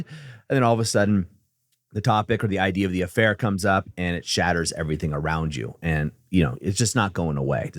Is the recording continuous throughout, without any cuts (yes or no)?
yes